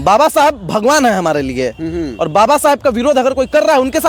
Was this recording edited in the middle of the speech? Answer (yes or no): no